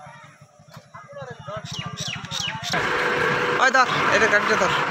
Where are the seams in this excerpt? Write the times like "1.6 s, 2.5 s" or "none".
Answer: 2.7 s